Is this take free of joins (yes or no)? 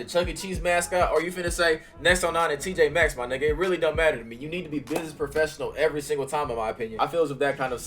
yes